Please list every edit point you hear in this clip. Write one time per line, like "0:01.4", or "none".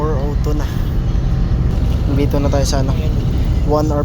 0:01.7